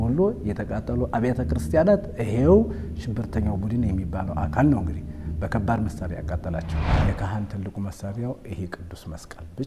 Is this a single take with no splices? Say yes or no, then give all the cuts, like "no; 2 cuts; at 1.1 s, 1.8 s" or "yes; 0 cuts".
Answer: no; 1 cut; at 7.0 s